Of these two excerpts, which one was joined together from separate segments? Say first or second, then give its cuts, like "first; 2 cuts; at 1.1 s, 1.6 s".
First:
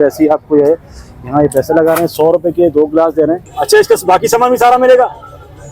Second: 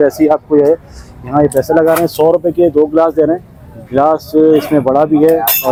first; 1 cut; at 3.5 s